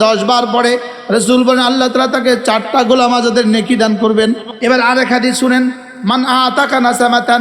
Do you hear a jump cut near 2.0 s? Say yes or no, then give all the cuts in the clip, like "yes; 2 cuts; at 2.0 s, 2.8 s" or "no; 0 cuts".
no; 1 cut; at 4.5 s